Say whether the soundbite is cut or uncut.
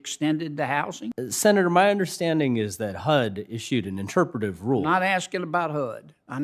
cut